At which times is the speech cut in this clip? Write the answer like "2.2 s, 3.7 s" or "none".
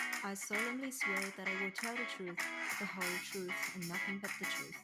none